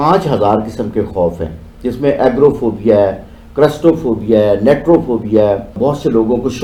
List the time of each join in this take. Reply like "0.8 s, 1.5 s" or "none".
none